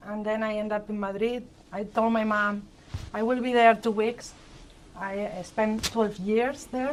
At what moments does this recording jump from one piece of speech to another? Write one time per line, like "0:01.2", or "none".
none